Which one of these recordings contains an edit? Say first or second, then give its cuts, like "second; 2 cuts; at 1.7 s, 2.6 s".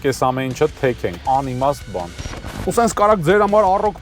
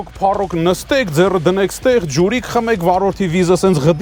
first; 1 cut; at 2.4 s